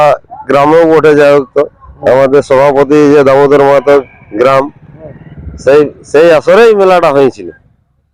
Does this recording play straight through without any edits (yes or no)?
yes